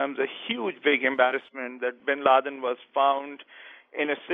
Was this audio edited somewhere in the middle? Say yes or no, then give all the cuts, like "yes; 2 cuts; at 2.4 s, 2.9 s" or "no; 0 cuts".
no; 0 cuts